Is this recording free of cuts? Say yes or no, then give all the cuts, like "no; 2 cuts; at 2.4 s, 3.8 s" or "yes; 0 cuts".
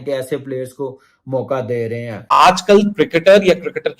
no; 1 cut; at 2.2 s